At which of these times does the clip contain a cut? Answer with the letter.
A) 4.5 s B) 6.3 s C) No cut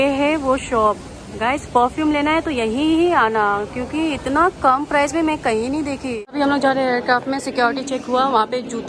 B